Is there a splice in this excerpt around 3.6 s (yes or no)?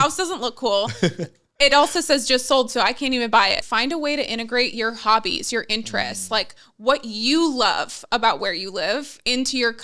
yes